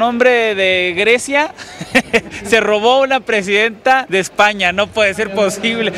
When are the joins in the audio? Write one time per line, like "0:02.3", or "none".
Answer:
none